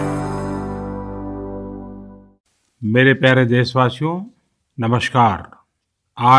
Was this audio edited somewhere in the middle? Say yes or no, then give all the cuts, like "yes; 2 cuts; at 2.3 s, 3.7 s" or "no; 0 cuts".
no; 0 cuts